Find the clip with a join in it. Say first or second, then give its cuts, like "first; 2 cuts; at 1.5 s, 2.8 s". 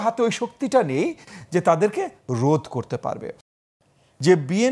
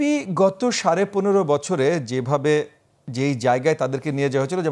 first; 1 cut; at 3.5 s